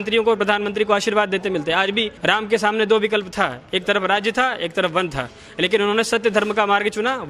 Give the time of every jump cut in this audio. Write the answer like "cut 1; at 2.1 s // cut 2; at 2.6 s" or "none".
cut 1; at 2.1 s